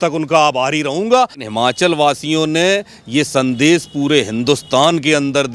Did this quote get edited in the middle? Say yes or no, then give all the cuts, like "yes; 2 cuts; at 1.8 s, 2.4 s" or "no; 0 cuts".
yes; 1 cut; at 1.5 s